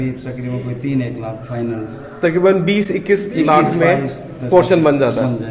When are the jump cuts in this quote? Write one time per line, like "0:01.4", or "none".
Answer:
none